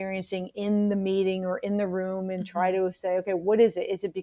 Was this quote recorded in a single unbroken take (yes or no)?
yes